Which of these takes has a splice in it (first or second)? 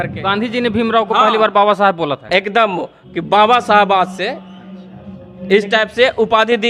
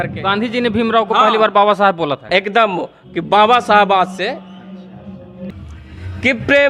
second